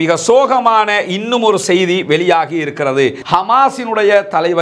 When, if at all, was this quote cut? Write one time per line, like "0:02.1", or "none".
0:03.2